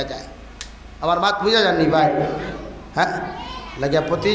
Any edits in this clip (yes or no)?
yes